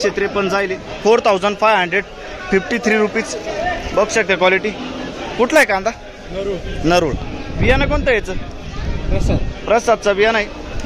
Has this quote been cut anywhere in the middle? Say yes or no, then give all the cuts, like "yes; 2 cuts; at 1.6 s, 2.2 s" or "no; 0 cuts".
no; 0 cuts